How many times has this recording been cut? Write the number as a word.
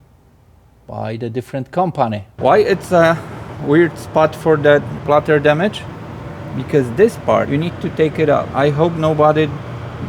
three